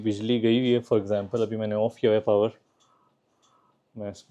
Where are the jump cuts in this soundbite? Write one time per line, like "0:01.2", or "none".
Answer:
none